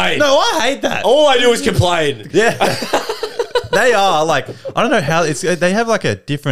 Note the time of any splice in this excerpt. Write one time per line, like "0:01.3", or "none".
0:02.2